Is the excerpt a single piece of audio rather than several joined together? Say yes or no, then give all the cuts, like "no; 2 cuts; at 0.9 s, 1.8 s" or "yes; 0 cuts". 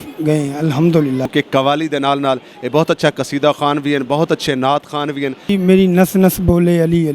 no; 2 cuts; at 1.3 s, 5.5 s